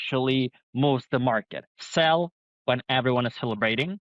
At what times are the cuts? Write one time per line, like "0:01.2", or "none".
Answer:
0:01.6